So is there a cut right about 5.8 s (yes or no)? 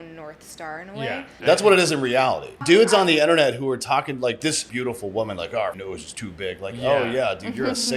yes